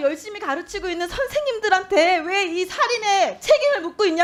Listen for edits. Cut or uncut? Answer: uncut